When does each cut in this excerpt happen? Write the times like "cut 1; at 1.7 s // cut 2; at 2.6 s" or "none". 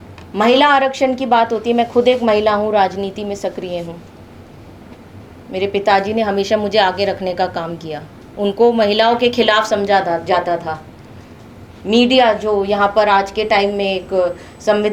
none